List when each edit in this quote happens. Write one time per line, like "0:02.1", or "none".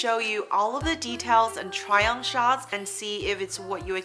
0:02.7

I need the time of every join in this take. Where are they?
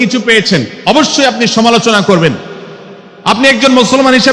none

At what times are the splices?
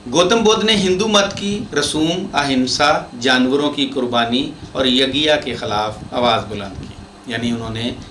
none

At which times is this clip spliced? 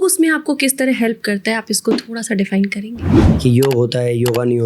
0:03.1

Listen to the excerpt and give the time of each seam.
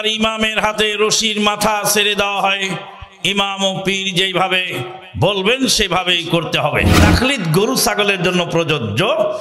0:06.9

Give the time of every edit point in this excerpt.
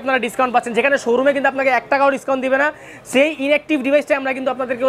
none

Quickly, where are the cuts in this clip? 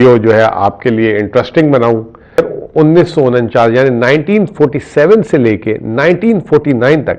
0:02.4

